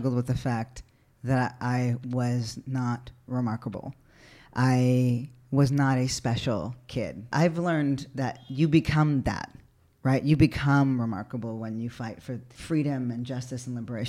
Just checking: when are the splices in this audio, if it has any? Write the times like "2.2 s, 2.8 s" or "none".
7.3 s, 8.4 s, 12.5 s